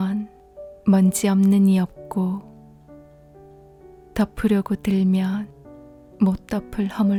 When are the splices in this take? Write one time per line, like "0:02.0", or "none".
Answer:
none